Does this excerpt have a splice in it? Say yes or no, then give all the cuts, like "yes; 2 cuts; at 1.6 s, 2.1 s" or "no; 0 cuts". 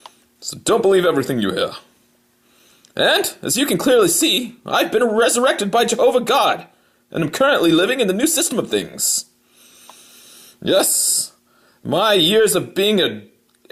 no; 0 cuts